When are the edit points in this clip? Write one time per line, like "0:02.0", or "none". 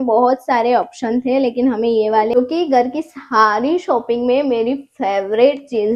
0:02.3